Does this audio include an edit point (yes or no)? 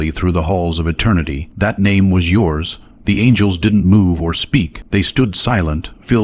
yes